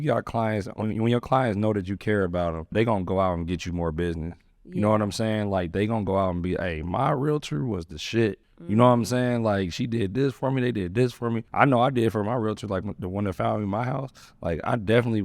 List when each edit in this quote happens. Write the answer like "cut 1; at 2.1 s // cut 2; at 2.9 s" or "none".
cut 1; at 2.7 s // cut 2; at 8.5 s // cut 3; at 11.4 s